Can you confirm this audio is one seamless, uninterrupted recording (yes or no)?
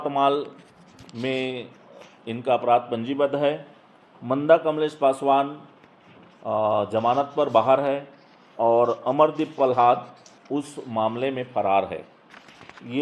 yes